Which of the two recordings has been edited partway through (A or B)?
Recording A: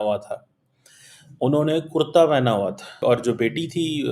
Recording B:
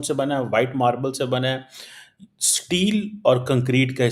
A